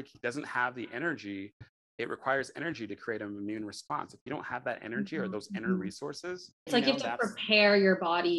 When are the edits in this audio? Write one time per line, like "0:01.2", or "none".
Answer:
0:06.5